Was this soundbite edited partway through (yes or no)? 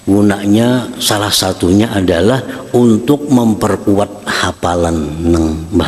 no